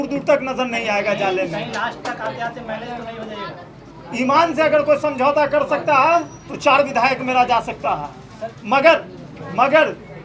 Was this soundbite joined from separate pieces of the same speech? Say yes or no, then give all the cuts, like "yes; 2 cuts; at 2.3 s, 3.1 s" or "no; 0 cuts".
no; 0 cuts